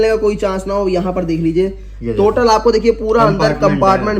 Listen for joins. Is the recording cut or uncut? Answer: uncut